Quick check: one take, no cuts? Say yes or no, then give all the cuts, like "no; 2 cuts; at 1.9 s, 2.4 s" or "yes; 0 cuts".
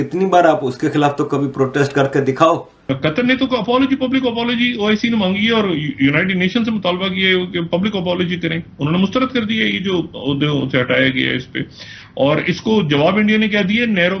no; 1 cut; at 2.7 s